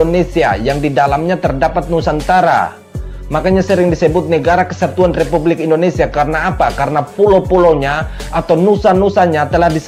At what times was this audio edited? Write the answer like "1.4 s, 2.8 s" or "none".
none